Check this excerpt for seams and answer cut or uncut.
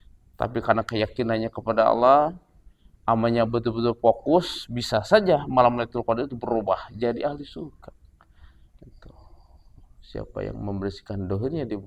cut